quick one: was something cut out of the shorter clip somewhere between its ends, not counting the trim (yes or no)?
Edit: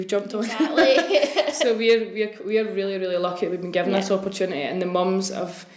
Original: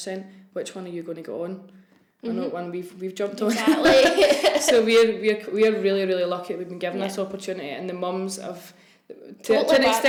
no